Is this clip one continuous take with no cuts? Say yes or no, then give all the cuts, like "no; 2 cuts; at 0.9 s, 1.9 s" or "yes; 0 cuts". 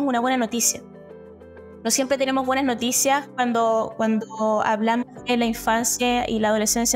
yes; 0 cuts